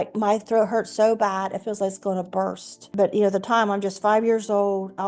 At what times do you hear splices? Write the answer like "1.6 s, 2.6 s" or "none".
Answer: 2.8 s